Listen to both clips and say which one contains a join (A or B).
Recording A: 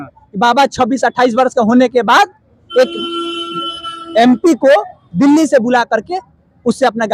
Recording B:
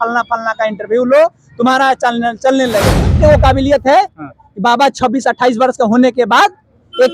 B